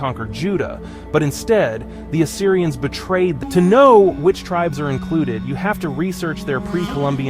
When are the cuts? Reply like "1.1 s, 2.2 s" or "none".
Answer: 3.4 s